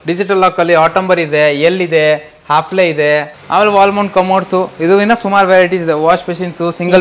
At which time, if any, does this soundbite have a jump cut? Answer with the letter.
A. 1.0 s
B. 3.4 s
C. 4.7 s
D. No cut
B